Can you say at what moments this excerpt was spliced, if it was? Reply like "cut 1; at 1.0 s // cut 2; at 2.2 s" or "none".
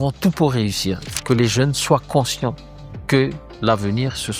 cut 1; at 1.0 s